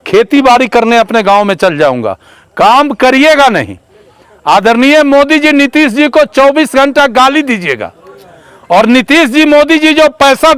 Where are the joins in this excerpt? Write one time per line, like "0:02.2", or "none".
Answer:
none